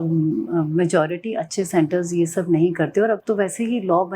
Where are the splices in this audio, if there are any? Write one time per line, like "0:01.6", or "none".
none